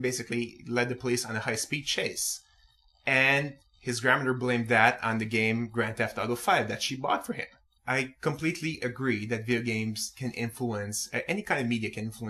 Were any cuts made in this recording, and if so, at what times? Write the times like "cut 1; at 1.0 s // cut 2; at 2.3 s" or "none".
none